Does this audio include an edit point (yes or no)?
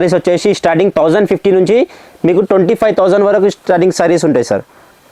no